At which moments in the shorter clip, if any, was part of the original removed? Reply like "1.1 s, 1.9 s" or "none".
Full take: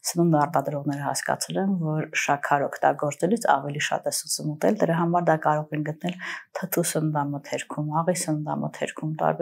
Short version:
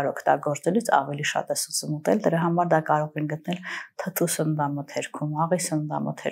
none